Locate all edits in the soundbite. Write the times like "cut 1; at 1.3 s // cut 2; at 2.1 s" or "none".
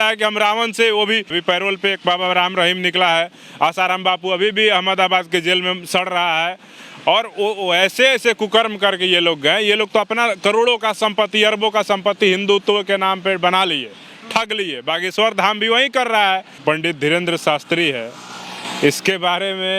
cut 1; at 1.3 s // cut 2; at 16.5 s